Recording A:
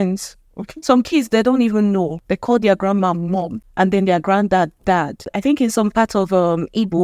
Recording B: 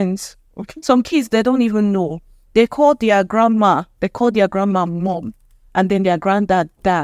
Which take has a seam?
A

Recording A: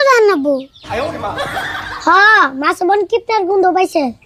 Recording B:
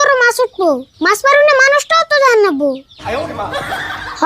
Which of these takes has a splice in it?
B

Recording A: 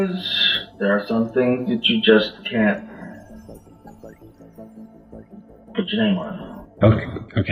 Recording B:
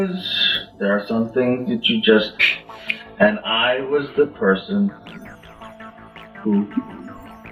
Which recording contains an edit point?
A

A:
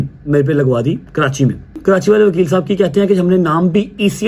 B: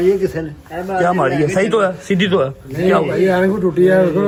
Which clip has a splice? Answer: A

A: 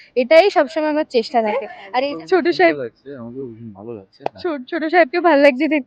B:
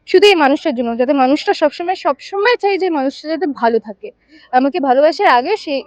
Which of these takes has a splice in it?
A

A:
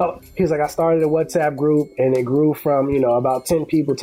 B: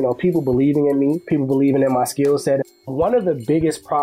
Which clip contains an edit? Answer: B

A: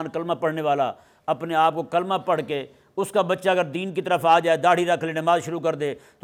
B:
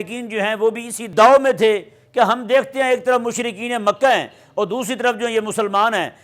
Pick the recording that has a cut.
B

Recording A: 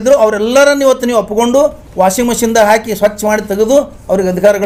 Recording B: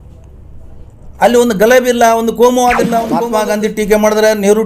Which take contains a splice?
B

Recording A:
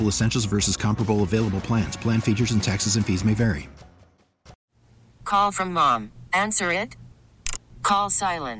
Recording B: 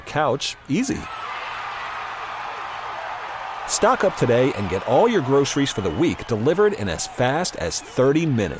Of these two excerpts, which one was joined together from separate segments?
A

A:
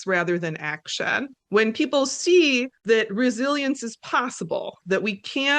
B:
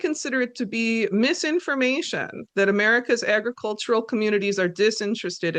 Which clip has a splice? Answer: A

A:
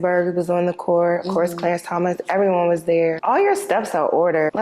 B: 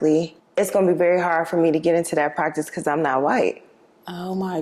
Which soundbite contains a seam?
A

